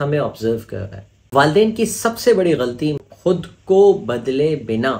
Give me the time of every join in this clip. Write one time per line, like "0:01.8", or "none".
0:01.1
0:03.0